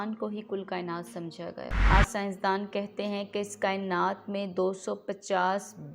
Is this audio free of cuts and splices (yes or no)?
no